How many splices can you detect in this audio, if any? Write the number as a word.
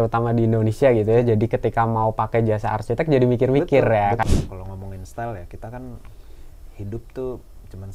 one